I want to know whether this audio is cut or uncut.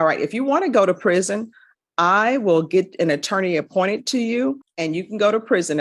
uncut